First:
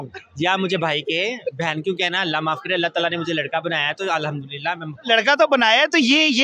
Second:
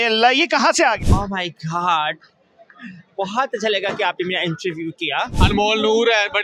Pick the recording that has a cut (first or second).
second